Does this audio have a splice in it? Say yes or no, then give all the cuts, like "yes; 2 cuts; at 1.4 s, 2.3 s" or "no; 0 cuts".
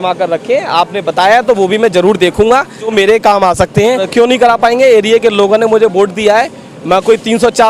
yes; 2 cuts; at 2.9 s, 4.1 s